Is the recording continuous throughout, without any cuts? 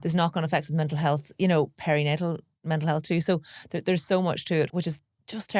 no; 1 cut; at 4.7 s

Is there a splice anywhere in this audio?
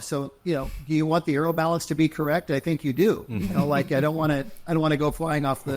no; 0 cuts

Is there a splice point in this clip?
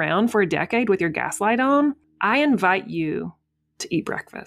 yes; 1 cut; at 2.1 s

